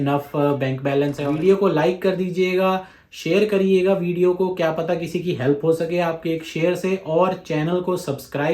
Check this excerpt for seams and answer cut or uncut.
cut